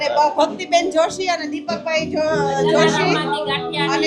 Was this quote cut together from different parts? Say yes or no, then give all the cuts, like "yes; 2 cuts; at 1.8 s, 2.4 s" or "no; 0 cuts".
no; 0 cuts